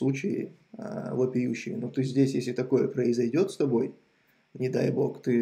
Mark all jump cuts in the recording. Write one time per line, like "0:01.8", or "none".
none